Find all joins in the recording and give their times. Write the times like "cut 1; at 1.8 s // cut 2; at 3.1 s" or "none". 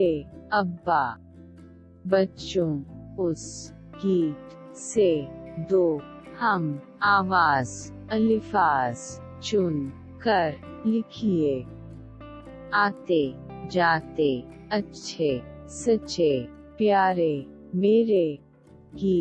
cut 1; at 1.2 s